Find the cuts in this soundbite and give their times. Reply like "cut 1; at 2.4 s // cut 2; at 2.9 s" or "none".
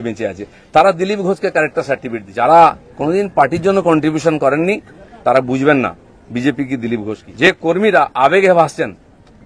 cut 1; at 2.2 s // cut 2; at 7.2 s